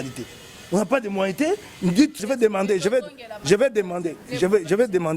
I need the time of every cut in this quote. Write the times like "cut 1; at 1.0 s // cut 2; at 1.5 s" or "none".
cut 1; at 2.2 s